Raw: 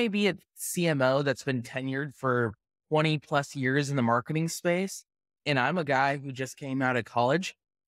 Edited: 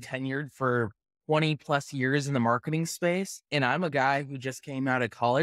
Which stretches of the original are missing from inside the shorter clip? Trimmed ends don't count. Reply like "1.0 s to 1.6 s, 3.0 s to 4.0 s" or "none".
5.0 s to 5.3 s